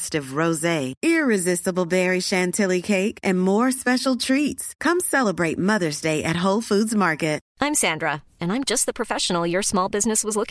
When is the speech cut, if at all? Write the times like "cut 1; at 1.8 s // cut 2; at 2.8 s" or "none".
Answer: cut 1; at 7.4 s

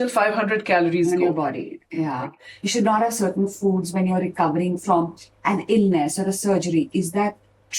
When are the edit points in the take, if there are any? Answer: cut 1; at 2.3 s

